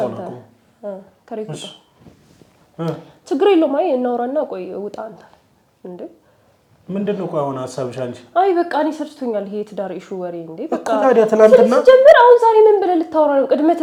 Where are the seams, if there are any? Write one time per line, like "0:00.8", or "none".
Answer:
none